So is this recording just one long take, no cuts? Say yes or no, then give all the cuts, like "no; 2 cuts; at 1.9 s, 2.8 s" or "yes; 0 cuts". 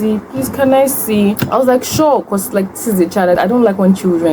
no; 2 cuts; at 1.4 s, 3.4 s